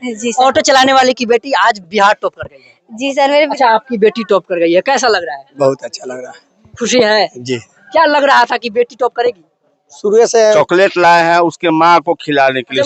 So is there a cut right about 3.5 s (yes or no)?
yes